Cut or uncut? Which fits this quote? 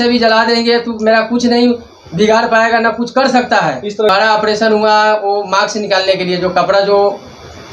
cut